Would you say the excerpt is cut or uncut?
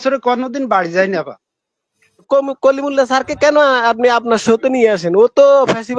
cut